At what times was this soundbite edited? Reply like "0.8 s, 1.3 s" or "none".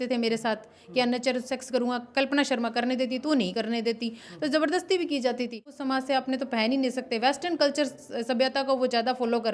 5.7 s